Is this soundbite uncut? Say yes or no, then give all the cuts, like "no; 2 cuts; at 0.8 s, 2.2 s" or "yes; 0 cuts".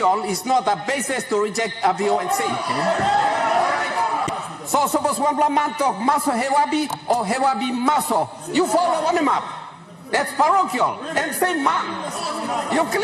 yes; 0 cuts